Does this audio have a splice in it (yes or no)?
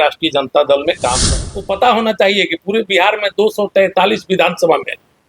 yes